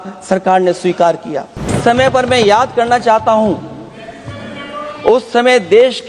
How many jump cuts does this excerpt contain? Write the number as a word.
one